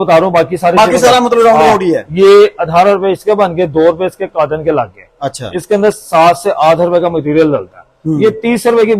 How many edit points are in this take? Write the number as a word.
zero